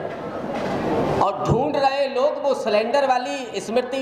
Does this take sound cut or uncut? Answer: uncut